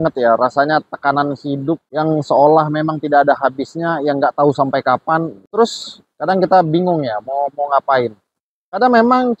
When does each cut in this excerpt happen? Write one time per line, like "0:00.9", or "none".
none